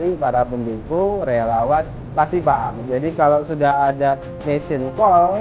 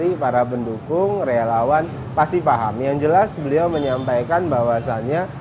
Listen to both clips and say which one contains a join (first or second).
first